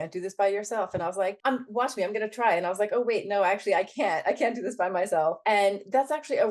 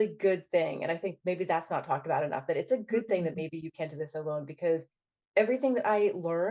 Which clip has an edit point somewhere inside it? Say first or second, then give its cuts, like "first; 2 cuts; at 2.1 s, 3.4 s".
first; 2 cuts; at 1.4 s, 5.4 s